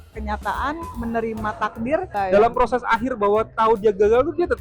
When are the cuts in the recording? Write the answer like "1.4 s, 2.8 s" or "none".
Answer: 2.1 s